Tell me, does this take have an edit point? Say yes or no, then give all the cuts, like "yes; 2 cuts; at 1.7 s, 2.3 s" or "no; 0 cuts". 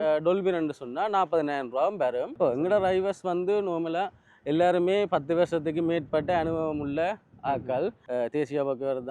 yes; 2 cuts; at 2.3 s, 8.0 s